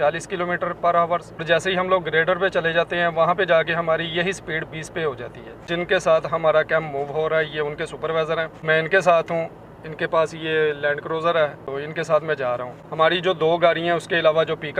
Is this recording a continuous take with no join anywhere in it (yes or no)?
yes